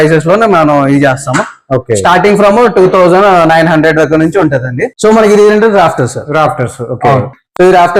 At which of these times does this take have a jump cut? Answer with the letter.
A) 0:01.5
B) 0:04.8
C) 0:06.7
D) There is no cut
B